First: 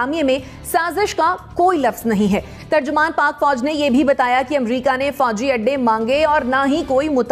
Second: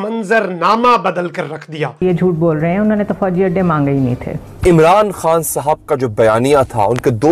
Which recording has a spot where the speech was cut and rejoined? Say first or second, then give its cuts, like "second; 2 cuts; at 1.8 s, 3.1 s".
second; 2 cuts; at 2.0 s, 4.3 s